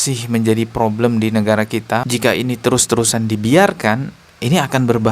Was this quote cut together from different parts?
yes; 1 cut; at 2.1 s

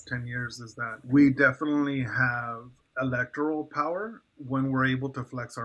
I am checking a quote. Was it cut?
yes; 1 cut; at 1.0 s

